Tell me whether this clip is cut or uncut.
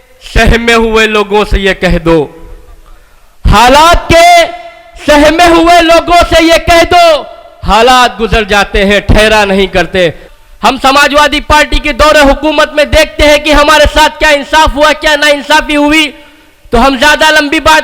cut